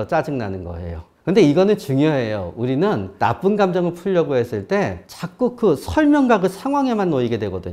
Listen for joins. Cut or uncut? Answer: uncut